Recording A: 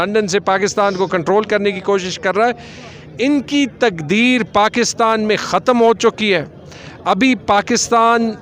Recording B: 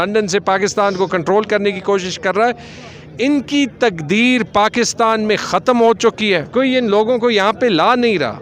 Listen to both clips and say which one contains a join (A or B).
B